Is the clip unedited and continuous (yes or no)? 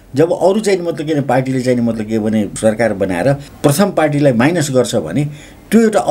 no